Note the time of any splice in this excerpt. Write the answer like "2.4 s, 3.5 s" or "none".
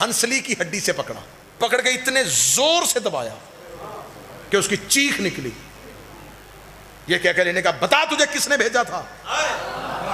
1.6 s